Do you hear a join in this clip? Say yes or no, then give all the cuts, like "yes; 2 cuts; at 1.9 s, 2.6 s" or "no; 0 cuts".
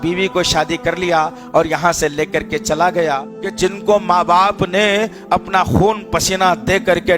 yes; 1 cut; at 3.3 s